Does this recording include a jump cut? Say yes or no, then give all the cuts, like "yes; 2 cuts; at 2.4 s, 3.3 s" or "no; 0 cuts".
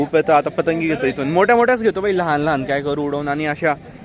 no; 0 cuts